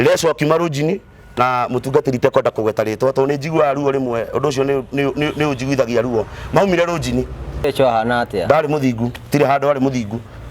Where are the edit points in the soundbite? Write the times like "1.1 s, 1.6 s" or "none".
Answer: 7.7 s